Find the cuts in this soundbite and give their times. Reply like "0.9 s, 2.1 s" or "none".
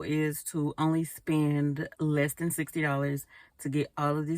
1.9 s